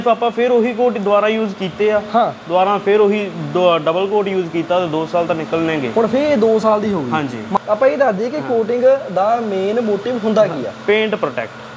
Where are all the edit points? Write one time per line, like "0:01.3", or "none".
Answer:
0:07.6